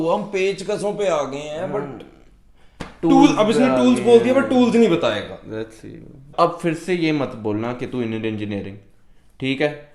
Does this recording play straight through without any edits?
no; 1 cut; at 6.2 s

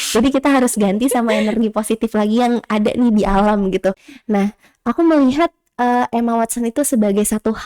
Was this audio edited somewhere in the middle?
yes; 1 cut; at 4.1 s

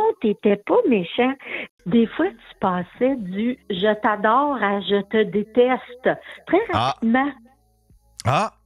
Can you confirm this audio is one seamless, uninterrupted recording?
no; 1 cut; at 1.6 s

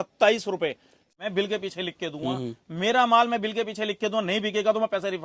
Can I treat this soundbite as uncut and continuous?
no; 1 cut; at 1.0 s

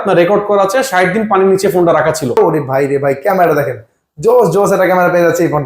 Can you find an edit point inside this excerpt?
yes; 1 cut; at 2.4 s

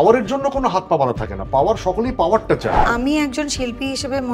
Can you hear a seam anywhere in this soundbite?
yes; 1 cut; at 2.8 s

